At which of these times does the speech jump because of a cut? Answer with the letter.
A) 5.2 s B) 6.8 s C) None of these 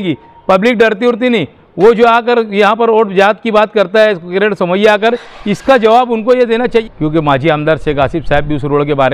B